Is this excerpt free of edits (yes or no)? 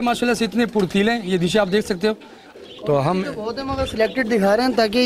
no